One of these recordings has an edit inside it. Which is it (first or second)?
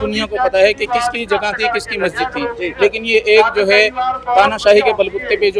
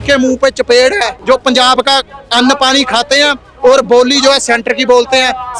second